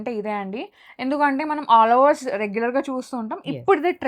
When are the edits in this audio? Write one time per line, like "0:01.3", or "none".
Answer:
none